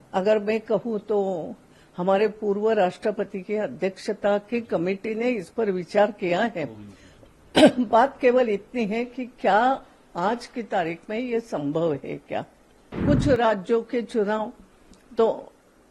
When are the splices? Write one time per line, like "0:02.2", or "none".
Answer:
0:13.0